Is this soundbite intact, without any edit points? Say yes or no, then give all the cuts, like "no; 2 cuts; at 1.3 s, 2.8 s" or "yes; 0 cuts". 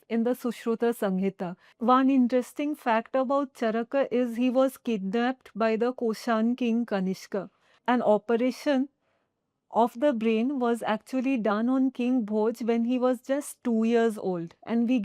no; 2 cuts; at 1.7 s, 7.7 s